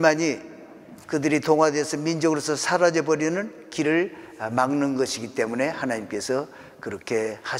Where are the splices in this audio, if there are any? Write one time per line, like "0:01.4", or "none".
none